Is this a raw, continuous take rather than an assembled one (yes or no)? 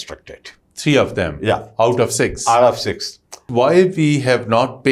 no